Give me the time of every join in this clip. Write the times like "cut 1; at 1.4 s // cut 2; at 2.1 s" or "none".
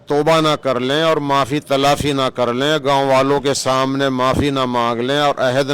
none